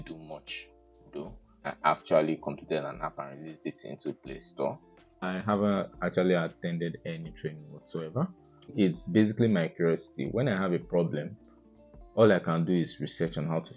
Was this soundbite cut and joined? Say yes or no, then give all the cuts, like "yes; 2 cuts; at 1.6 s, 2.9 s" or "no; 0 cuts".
yes; 3 cuts; at 1.6 s, 5.2 s, 8.7 s